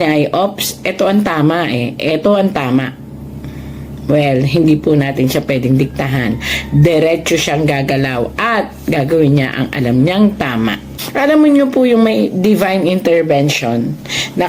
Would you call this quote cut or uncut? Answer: cut